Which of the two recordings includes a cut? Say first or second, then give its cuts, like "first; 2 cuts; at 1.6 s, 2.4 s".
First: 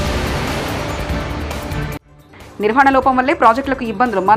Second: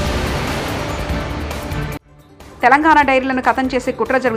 first; 1 cut; at 2.1 s